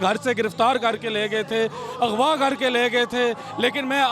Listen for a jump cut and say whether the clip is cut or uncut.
uncut